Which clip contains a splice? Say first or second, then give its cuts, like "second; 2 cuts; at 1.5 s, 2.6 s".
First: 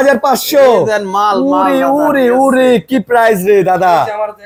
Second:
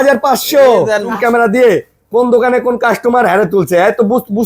second; 1 cut; at 1.1 s